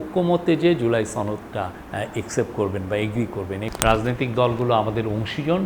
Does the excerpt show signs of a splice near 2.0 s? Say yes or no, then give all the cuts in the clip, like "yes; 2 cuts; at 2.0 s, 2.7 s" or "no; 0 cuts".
no; 1 cut; at 3.7 s